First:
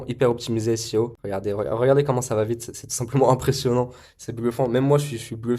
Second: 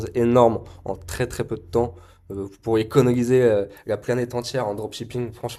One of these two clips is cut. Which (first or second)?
first